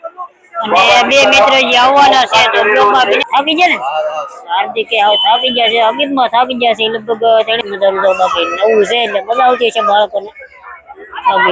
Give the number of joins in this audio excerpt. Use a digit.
2